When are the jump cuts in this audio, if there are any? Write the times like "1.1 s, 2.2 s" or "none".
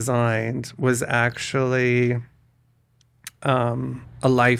none

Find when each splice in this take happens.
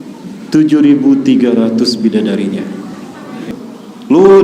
3.4 s

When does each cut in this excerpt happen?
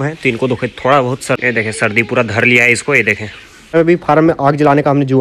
1.4 s, 3.7 s

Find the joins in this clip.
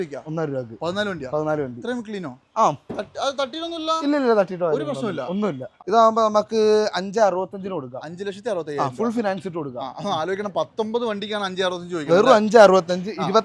5.7 s

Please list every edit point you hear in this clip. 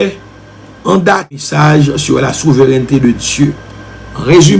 1.4 s

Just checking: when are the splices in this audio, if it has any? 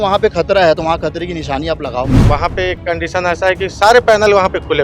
2.2 s

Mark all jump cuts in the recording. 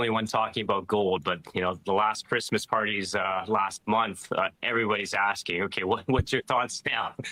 none

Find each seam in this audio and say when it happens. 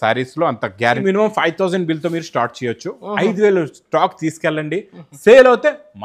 1.0 s

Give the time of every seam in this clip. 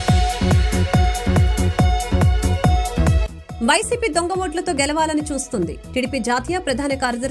none

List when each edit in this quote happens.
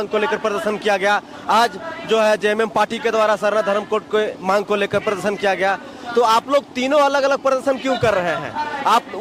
none

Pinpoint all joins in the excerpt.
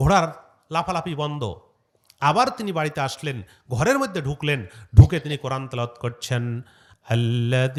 none

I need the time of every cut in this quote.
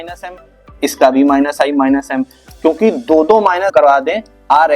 3.7 s

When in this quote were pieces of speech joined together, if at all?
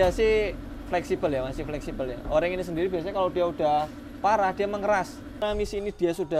5.4 s

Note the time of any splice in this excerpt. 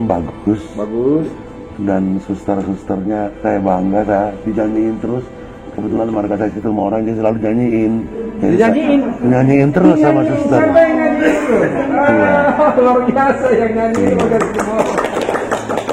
8.2 s

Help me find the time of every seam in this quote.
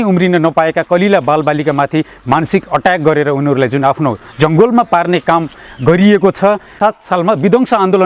6.8 s

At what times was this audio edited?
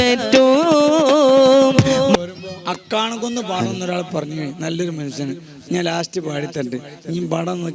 2.2 s

